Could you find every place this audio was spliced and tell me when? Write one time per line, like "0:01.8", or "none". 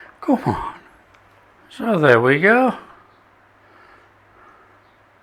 none